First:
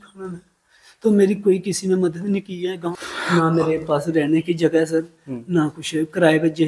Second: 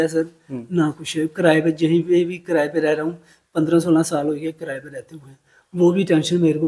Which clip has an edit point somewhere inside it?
first; 1 cut; at 2.9 s

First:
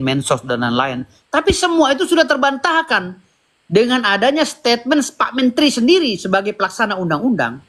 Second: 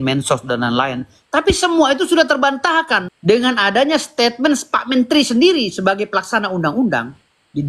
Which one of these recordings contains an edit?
second; 1 cut; at 3.1 s

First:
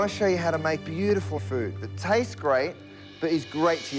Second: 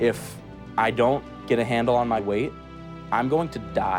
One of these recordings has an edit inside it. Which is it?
first; 1 cut; at 0.9 s

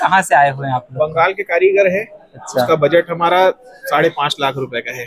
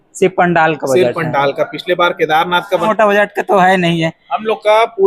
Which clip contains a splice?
second; 1 cut; at 2.9 s

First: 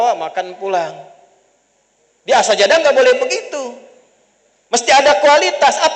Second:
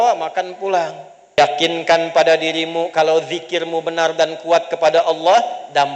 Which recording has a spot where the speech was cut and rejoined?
second; 1 cut; at 1.4 s

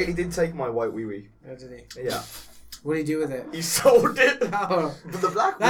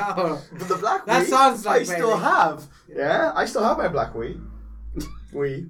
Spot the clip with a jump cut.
first; 1 cut; at 1.3 s

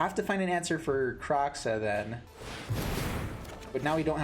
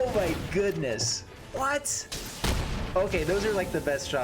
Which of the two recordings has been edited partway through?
first; 1 cut; at 2.3 s

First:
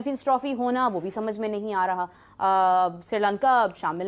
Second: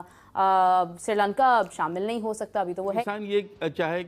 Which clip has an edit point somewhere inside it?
second; 1 cut; at 3.0 s

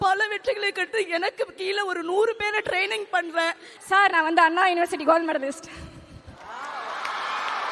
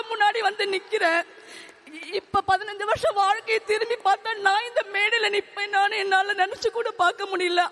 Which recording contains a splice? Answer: first; 1 cut; at 3.7 s

